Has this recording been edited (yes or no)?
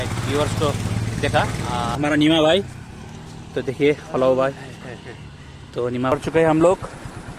yes